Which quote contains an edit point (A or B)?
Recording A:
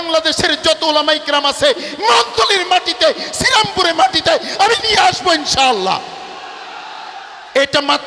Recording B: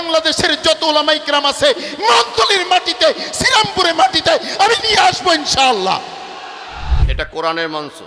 B